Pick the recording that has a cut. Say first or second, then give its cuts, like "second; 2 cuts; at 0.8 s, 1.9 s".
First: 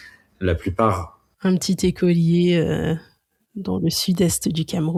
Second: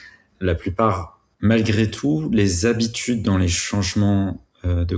second; 1 cut; at 1.3 s